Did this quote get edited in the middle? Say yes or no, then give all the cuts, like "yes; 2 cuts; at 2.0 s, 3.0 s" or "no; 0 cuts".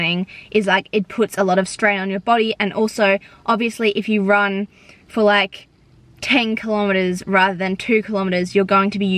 no; 0 cuts